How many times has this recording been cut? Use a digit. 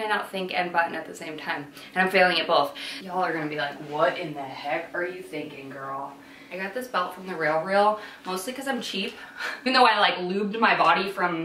3